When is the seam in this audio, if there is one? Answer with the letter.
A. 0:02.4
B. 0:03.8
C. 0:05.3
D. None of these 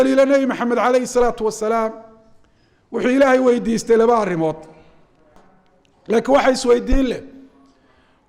C